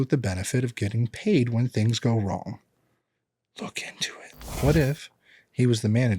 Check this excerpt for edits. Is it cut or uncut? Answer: cut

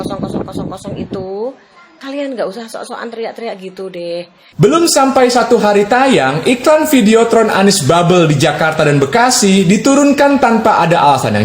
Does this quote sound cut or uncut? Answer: cut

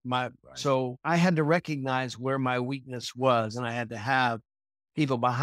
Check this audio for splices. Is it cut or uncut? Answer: cut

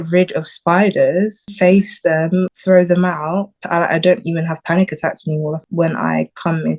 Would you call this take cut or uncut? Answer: cut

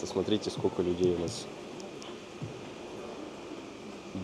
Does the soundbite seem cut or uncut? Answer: uncut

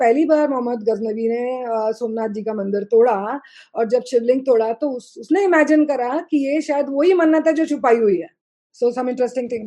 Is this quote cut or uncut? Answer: cut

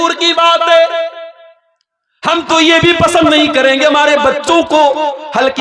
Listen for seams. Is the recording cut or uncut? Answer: uncut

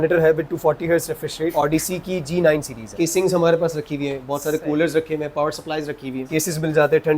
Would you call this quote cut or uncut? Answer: cut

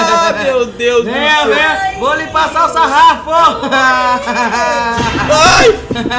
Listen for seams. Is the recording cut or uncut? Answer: uncut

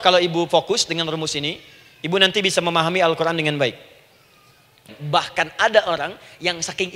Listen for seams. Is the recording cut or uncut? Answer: cut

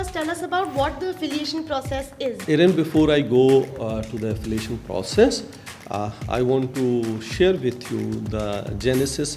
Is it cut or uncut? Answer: cut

